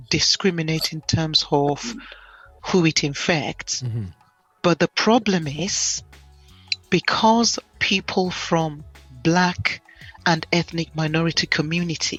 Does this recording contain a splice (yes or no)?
no